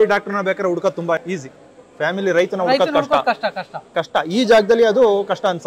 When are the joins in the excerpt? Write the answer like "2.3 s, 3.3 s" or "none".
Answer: 1.2 s

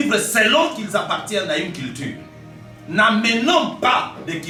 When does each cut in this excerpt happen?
none

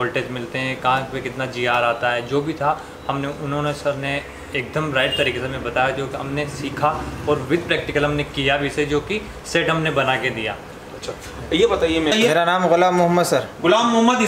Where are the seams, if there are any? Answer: 12.1 s

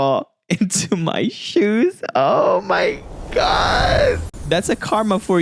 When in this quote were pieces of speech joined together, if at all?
4.3 s

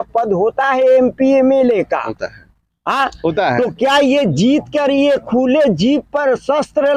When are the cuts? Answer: none

